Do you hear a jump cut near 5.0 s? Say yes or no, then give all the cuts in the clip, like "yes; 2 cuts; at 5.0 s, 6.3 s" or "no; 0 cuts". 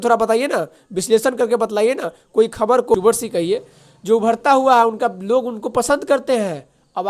no; 1 cut; at 2.9 s